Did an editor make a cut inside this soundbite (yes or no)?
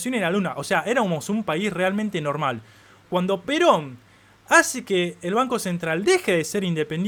no